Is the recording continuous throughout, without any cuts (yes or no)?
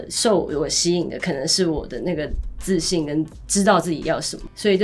yes